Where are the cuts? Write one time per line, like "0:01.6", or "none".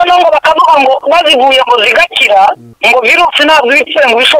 0:01.0
0:02.7